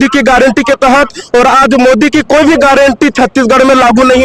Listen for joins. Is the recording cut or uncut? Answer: uncut